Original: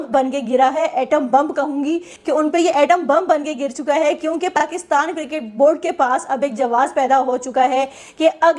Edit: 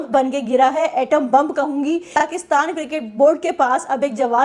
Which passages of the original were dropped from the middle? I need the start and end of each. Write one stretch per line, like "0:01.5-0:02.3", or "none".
0:02.1-0:04.5